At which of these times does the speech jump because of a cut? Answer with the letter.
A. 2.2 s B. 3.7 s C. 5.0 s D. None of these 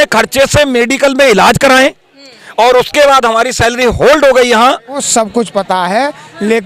C